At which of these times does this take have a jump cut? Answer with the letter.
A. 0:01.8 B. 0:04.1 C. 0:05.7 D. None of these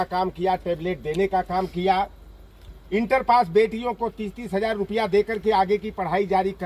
D